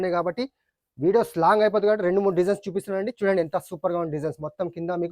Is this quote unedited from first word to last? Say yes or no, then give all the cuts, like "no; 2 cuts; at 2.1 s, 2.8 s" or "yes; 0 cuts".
yes; 0 cuts